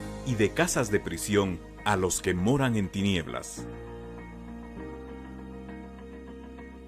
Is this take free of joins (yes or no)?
no